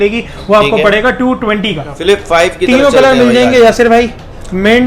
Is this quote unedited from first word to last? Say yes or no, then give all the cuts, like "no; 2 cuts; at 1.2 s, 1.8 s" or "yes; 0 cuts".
no; 1 cut; at 1.9 s